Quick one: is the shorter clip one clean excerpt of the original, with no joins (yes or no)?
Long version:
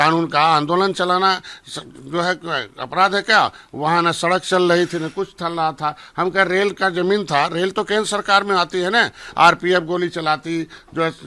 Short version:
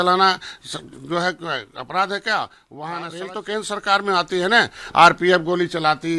no